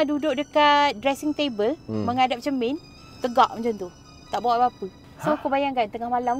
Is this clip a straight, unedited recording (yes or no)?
yes